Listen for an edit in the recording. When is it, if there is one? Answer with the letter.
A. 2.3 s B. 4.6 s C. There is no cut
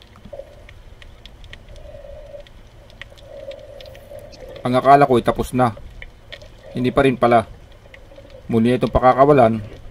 B